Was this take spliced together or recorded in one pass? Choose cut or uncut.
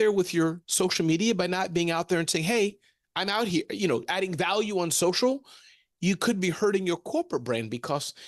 uncut